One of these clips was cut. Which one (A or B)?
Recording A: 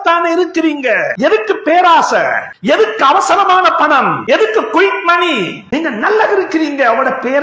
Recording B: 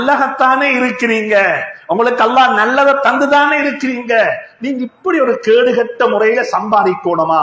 A